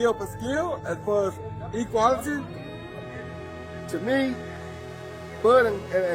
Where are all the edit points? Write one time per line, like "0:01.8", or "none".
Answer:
none